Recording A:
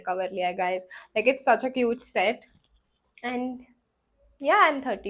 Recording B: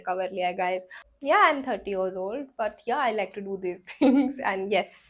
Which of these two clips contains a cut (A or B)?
B